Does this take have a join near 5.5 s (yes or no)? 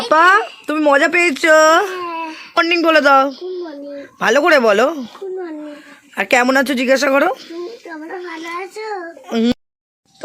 no